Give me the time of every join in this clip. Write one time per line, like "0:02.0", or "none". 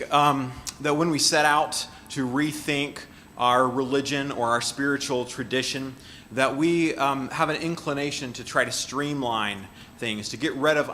0:03.8